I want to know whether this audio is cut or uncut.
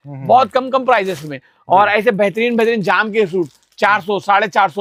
uncut